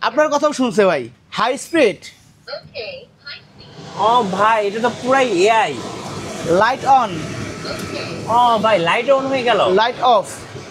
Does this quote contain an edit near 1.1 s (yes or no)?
yes